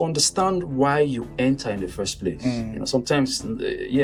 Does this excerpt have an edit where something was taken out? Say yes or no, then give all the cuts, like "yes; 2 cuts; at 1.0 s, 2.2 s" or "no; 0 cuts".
no; 0 cuts